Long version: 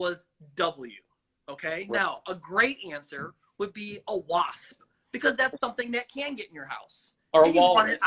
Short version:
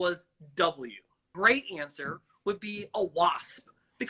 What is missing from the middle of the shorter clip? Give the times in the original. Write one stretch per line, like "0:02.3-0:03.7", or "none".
0:01.3-0:02.4

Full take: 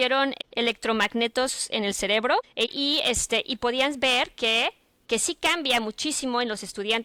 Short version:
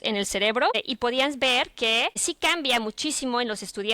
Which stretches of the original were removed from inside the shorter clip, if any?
0:02.5-0:03.4
0:04.9-0:05.3

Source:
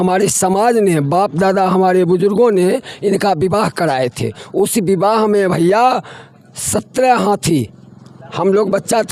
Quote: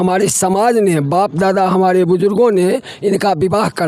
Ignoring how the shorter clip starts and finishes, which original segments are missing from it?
none

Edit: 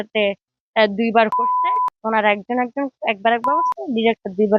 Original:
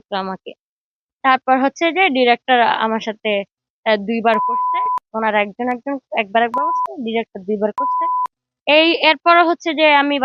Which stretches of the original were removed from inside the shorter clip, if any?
none

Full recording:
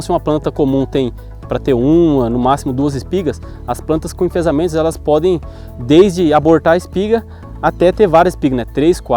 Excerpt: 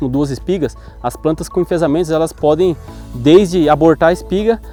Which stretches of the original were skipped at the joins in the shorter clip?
none

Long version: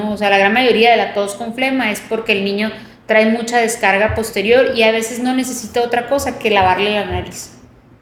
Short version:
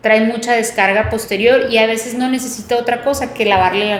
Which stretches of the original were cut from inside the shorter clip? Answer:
none

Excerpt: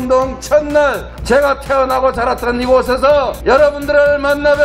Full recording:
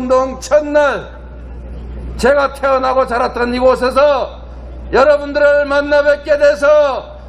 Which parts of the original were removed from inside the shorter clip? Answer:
0:01.1-0:02.0
0:04.5-0:05.0

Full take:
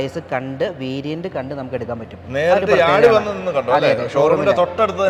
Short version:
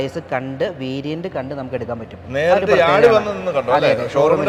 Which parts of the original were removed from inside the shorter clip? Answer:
none

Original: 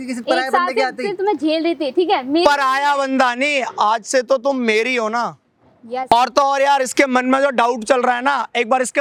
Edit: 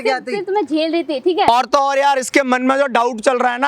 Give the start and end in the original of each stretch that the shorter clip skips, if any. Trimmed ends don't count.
0:02.2-0:06.1

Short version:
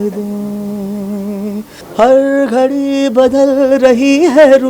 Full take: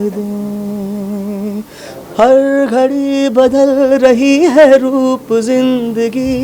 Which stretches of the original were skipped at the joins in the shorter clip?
0:01.8-0:02.0

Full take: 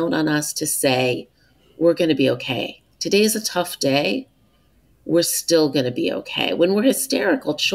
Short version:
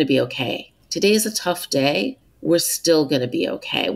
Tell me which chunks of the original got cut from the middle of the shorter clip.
0:04.4-0:04.9

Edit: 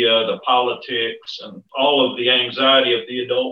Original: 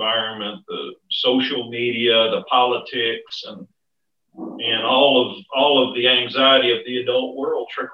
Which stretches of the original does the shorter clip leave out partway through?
0:03.7-0:05.4

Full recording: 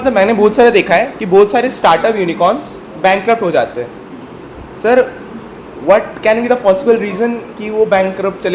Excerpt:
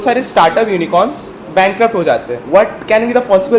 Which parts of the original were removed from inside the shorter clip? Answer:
0:03.8-0:05.7

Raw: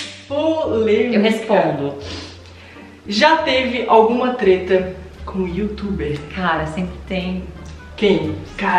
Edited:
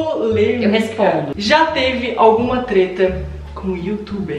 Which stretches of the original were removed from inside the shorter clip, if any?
0:01.8-0:03.0

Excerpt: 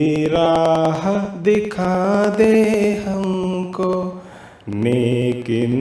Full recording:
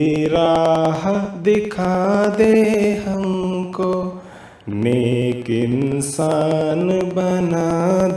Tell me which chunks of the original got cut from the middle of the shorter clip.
none

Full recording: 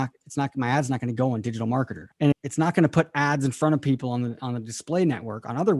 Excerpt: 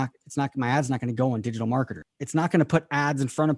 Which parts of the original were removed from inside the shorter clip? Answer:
0:02.2-0:02.4

